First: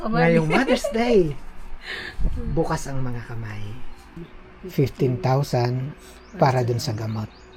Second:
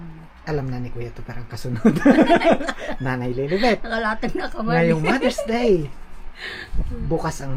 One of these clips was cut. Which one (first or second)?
first